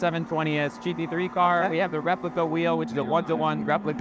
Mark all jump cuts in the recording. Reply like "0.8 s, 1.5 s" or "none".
none